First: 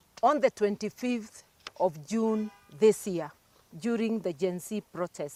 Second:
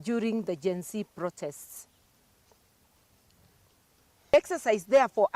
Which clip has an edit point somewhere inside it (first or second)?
second